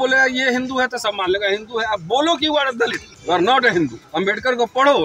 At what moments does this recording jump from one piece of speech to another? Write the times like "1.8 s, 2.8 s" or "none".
3.1 s, 4.0 s